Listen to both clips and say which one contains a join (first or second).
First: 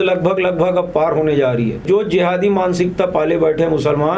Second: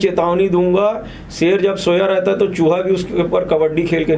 first